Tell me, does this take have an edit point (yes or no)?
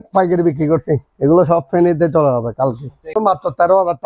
yes